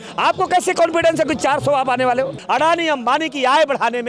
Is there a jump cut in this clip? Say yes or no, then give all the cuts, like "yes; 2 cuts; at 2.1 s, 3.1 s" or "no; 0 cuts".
yes; 1 cut; at 2.4 s